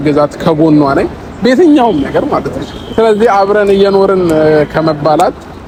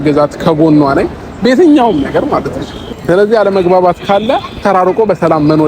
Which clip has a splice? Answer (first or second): second